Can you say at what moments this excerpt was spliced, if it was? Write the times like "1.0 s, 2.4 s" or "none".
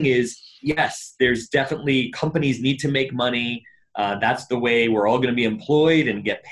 none